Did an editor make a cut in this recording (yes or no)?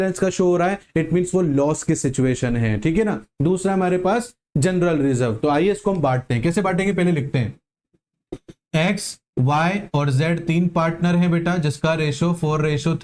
no